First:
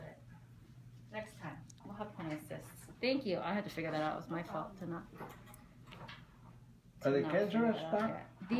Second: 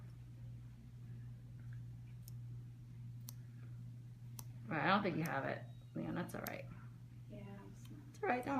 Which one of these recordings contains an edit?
second; 1 cut; at 6.7 s

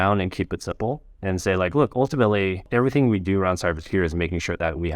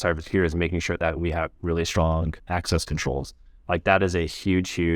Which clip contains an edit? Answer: first; 1 cut; at 2.7 s

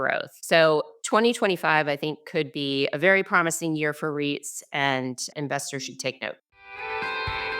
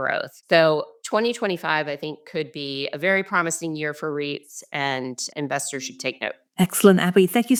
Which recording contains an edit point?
first; 1 cut; at 6.4 s

